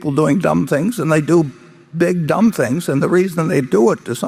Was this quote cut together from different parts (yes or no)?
no